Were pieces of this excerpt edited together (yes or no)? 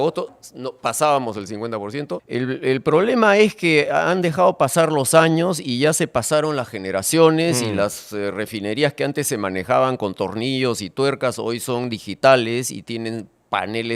yes